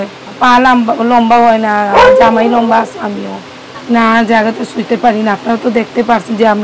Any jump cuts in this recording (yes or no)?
no